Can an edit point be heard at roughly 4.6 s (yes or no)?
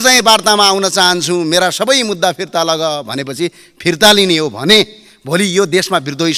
no